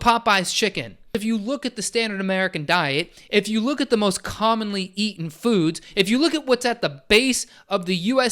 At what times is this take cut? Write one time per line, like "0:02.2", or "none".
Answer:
0:01.2

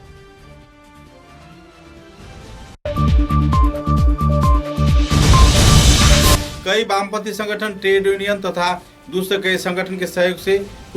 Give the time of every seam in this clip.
0:02.8
0:06.4

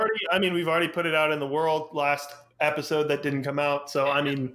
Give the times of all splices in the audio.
none

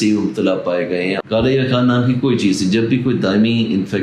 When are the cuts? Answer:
0:01.2

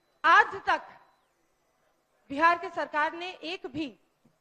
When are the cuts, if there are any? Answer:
none

